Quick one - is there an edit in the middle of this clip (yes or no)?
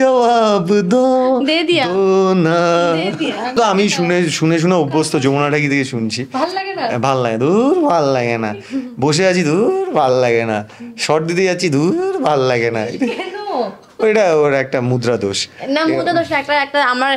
yes